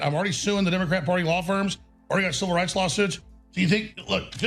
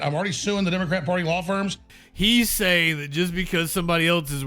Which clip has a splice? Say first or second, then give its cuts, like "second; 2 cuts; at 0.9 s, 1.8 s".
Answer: second; 1 cut; at 1.9 s